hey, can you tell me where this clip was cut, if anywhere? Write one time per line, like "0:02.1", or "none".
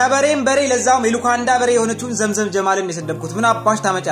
none